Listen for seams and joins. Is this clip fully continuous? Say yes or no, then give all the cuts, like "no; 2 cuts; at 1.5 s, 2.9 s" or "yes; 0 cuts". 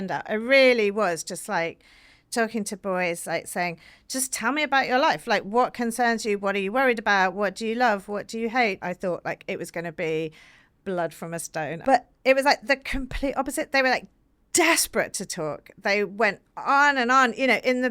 no; 2 cuts; at 8.8 s, 11.8 s